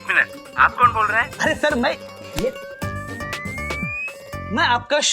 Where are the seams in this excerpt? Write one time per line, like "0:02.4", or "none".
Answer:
0:04.2